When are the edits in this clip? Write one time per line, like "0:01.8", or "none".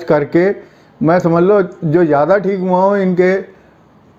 none